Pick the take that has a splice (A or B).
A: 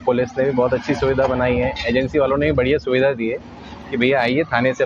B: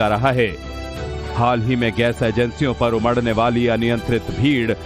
B